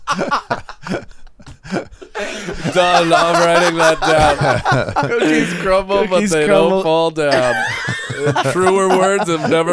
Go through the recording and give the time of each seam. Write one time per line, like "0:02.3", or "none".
none

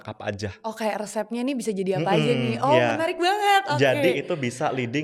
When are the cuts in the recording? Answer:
none

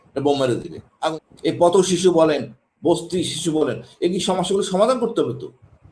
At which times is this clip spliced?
0:01.1

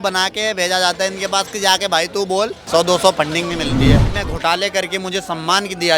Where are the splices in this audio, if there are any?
0:02.6
0:04.1

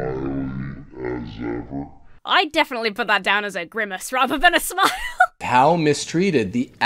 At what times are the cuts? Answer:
0:05.4

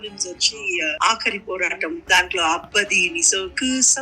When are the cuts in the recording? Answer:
0:01.0
0:02.0

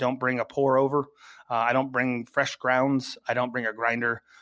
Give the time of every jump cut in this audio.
none

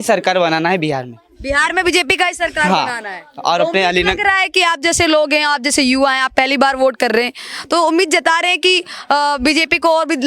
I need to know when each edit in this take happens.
none

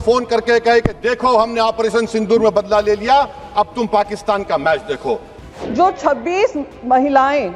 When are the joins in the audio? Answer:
0:05.4

